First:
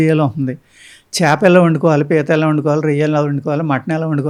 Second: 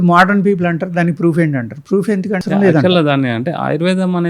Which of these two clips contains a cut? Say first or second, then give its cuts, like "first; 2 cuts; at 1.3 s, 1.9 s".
second; 1 cut; at 2.4 s